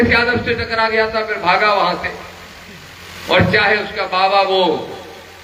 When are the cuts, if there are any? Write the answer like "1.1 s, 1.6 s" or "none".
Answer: none